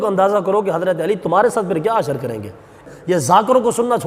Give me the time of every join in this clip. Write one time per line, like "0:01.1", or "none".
0:02.8